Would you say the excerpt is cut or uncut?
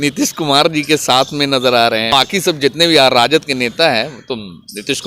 cut